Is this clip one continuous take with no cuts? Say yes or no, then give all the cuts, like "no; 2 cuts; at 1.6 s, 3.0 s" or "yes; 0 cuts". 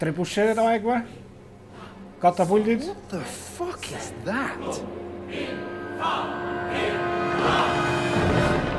no; 1 cut; at 2.8 s